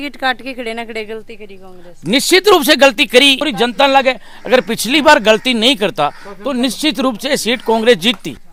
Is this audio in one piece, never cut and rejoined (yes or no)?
yes